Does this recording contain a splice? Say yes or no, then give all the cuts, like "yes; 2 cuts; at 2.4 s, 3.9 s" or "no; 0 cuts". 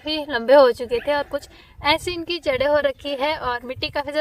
no; 0 cuts